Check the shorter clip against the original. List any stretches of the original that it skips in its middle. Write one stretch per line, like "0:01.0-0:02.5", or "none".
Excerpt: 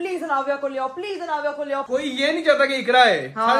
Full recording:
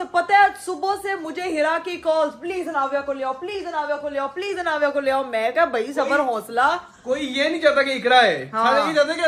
0:04.3-0:07.0